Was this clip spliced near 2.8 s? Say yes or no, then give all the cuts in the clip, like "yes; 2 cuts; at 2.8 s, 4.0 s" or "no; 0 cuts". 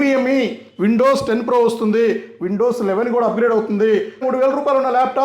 no; 1 cut; at 4.2 s